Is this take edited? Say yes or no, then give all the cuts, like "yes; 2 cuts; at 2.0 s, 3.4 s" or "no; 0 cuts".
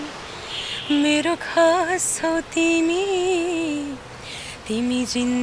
no; 0 cuts